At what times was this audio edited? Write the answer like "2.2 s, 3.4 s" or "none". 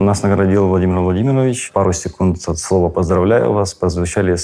1.7 s